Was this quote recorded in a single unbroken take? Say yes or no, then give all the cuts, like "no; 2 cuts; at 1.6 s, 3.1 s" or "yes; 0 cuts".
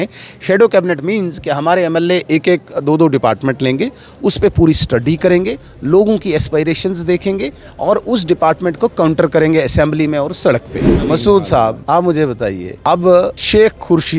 no; 4 cuts; at 10.9 s, 11.8 s, 12.7 s, 13.4 s